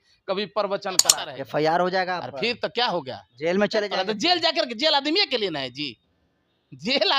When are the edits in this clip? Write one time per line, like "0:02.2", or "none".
0:01.1